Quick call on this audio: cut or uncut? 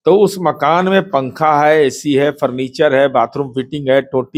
uncut